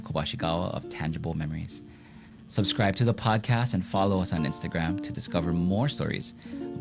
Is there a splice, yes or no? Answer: no